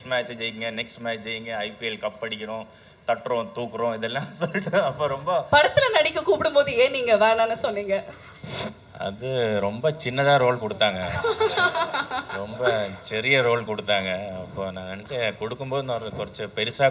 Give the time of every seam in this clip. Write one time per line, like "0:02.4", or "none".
0:05.4